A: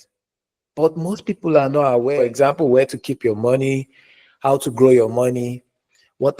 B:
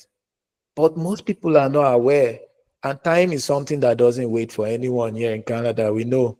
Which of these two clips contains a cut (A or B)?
A